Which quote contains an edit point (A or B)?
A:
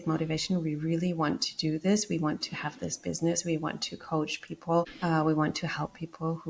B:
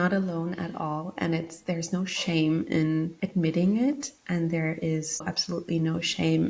B